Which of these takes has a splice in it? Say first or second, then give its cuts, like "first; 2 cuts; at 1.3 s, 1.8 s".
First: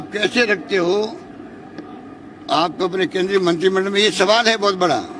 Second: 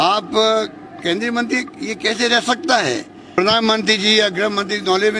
second; 1 cut; at 3.4 s